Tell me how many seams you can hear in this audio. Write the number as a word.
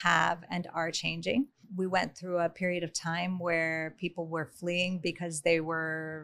one